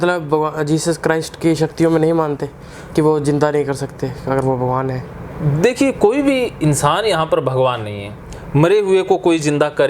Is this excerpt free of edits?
yes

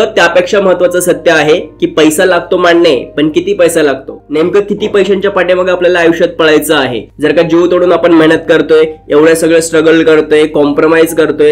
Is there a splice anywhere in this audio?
no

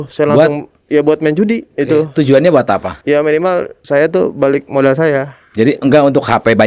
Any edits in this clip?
yes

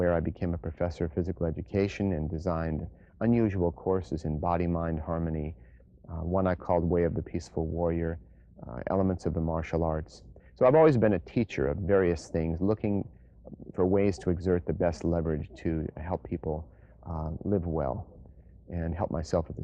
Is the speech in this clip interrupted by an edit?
yes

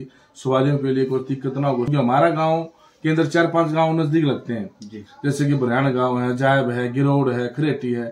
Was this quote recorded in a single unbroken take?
no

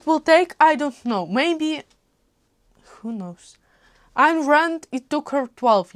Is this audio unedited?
yes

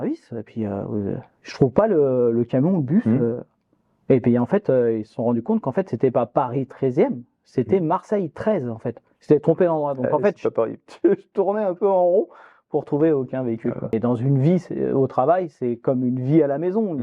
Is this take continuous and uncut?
no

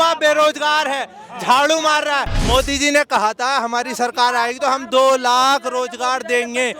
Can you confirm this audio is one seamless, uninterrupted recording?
no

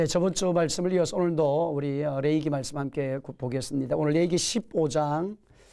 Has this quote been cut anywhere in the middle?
no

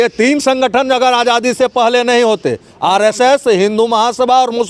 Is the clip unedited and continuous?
yes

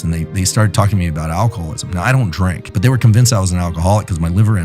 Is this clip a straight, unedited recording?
no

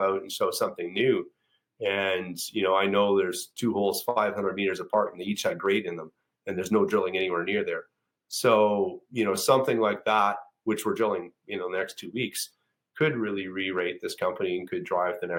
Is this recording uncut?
yes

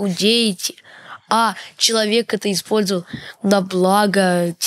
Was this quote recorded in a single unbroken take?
yes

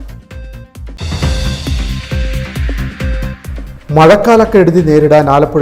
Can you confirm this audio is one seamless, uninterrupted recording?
yes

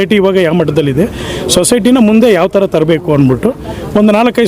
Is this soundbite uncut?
yes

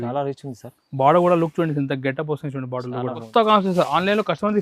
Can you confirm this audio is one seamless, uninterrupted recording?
no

